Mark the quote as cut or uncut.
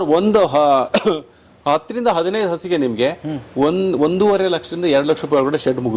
uncut